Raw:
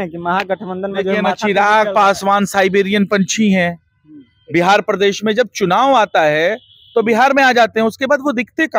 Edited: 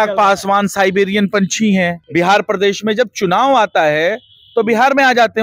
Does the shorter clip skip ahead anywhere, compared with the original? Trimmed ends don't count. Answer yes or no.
yes